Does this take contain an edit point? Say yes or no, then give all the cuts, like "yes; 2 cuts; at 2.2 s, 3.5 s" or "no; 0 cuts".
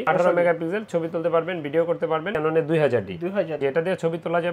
yes; 1 cut; at 2.3 s